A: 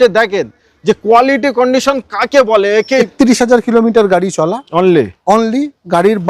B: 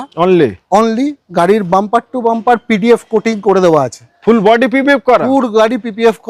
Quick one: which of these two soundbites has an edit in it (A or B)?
A